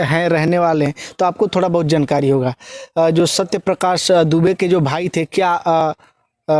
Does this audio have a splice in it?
no; 0 cuts

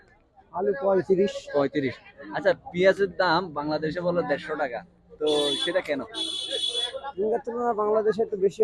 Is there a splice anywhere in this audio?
no; 0 cuts

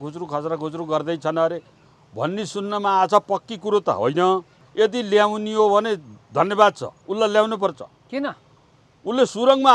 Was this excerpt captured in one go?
yes; 0 cuts

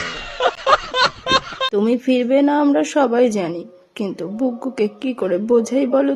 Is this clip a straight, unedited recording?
no; 1 cut; at 1.6 s

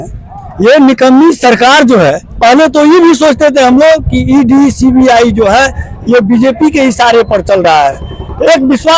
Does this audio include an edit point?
yes; 1 cut; at 2.3 s

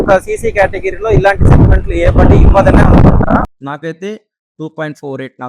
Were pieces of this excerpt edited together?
yes; 1 cut; at 3.4 s

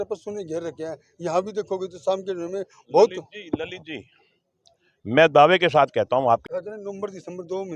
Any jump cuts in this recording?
yes; 1 cut; at 6.4 s

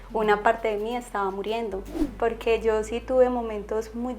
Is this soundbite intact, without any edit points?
no; 1 cut; at 2.0 s

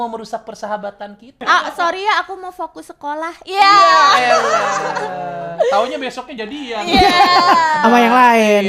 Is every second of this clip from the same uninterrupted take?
yes; 0 cuts

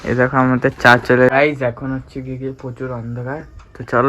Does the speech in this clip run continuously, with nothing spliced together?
no; 1 cut; at 1.3 s

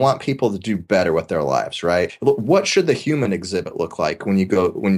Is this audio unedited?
no; 1 cut; at 2.1 s

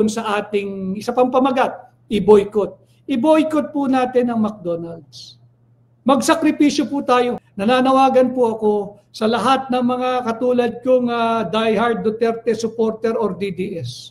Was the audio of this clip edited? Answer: yes; 1 cut; at 7.4 s

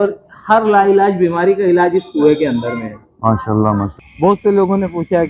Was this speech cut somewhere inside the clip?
yes; 1 cut; at 4.0 s

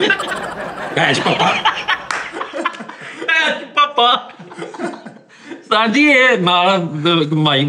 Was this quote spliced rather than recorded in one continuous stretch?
no; 0 cuts

